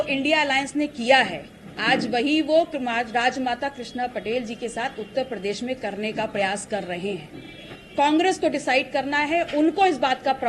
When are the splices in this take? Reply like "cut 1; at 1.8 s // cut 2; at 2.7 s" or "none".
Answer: cut 1; at 7.8 s